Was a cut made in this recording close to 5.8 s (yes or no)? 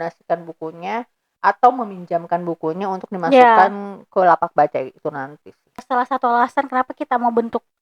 yes